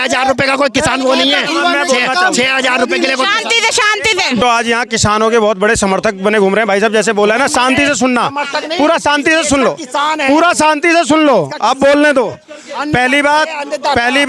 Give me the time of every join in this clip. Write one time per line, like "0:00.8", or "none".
0:04.4